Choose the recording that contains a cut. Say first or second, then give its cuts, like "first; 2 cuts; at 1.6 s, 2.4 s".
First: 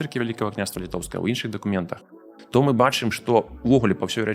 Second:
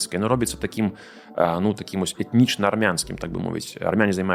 first; 1 cut; at 2.3 s